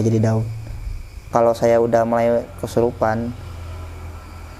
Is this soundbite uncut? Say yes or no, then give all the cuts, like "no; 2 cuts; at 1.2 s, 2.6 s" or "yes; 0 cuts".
no; 1 cut; at 1.2 s